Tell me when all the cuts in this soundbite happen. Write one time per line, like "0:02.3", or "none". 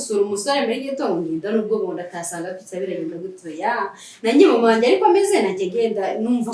none